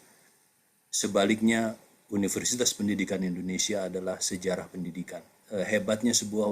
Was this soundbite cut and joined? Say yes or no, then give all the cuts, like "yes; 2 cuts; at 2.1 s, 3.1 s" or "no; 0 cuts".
yes; 1 cut; at 5.4 s